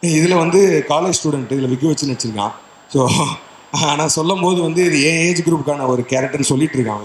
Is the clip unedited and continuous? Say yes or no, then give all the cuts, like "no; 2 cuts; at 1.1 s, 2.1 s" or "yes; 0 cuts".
yes; 0 cuts